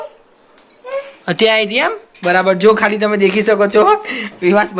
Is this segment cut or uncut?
uncut